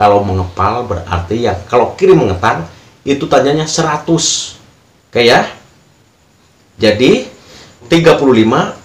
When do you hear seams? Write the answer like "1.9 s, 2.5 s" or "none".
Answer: 7.8 s